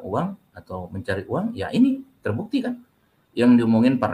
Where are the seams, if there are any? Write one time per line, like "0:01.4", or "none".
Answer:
none